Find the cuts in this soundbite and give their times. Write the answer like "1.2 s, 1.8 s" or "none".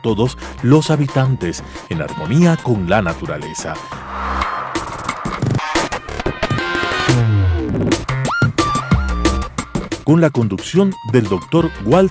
7.9 s